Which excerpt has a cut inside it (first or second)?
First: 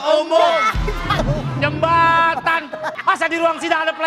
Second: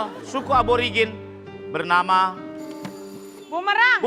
first